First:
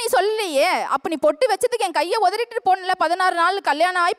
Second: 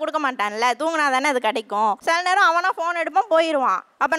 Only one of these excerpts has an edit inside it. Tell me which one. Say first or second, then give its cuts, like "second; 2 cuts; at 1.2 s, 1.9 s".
second; 1 cut; at 2.0 s